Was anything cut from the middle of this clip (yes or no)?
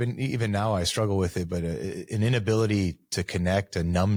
no